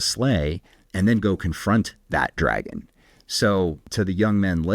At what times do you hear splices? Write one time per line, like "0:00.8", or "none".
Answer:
0:03.8